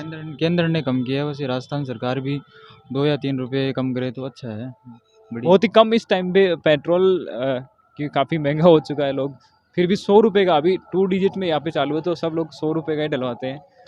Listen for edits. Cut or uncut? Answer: uncut